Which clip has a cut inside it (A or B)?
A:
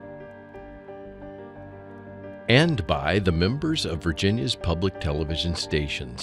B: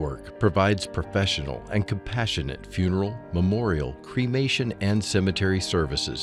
A